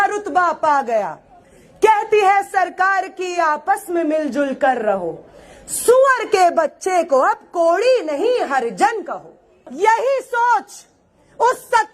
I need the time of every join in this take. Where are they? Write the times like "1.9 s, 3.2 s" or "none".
9.7 s